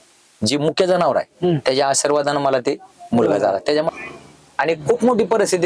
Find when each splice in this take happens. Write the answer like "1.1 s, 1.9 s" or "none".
none